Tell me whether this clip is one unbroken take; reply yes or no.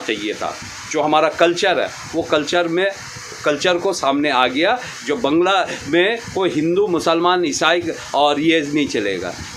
yes